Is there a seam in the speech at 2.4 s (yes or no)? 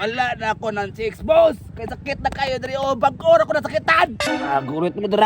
no